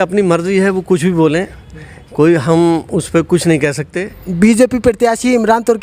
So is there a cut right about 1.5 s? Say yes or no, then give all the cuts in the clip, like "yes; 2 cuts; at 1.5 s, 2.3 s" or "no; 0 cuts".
no; 1 cut; at 4.1 s